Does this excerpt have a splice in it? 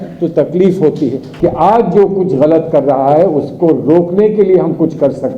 yes; 1 cut; at 1.2 s

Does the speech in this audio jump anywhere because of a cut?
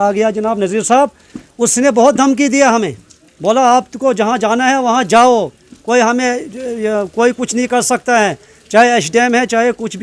no; 0 cuts

